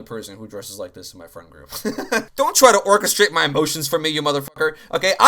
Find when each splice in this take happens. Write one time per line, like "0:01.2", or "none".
0:02.3